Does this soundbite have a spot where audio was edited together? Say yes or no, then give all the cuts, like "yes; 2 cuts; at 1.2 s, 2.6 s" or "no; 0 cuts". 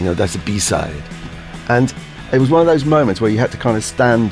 yes; 1 cut; at 2.1 s